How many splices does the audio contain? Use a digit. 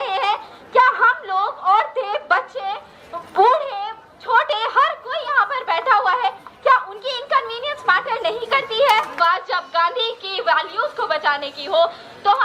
1